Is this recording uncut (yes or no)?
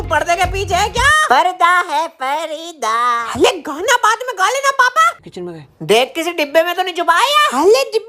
no